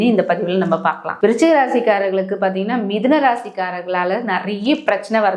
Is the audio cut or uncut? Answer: uncut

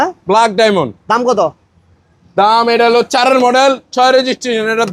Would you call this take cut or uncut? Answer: uncut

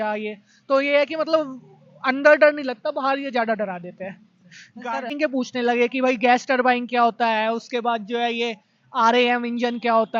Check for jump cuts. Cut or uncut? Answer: cut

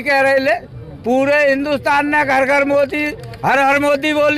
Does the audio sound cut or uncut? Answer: uncut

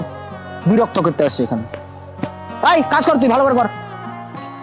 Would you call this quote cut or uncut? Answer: uncut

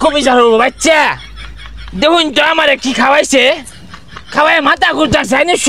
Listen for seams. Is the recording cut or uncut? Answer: uncut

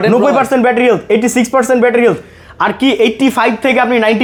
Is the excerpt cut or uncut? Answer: uncut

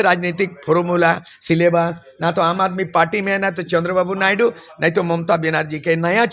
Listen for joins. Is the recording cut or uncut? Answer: uncut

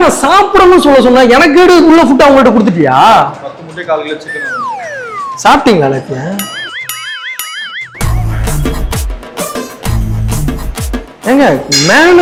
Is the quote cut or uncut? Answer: uncut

